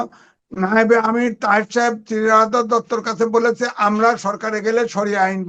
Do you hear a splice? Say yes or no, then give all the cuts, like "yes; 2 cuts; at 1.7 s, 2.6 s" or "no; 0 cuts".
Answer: no; 0 cuts